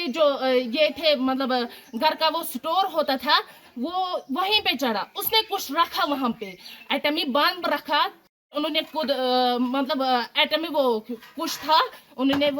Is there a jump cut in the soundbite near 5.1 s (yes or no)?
no